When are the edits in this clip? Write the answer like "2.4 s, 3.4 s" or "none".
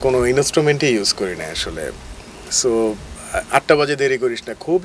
none